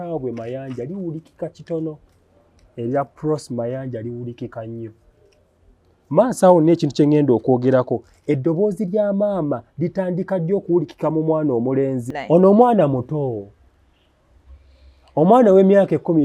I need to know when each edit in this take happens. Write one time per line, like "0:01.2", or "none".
0:12.1